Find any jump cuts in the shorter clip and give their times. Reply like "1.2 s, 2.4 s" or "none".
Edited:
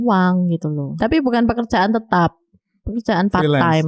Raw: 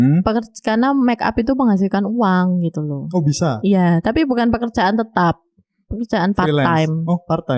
1.0 s